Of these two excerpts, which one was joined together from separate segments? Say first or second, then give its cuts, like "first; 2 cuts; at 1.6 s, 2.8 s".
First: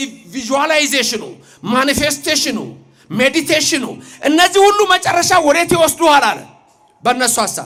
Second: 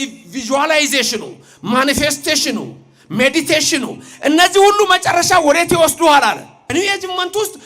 second; 1 cut; at 6.7 s